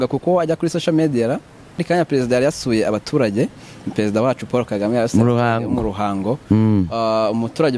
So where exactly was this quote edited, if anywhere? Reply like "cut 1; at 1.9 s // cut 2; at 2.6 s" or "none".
cut 1; at 1.8 s